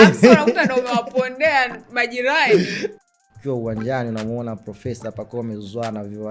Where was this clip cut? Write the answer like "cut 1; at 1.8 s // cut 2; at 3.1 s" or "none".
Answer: cut 1; at 2.9 s